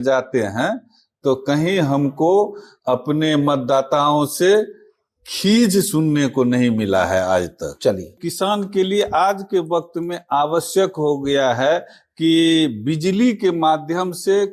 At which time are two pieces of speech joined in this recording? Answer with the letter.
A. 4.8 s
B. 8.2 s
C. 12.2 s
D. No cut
B